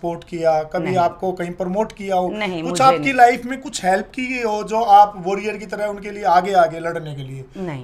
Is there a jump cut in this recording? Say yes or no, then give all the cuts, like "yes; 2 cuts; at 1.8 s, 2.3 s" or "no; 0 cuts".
no; 0 cuts